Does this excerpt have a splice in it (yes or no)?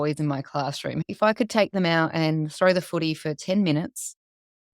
yes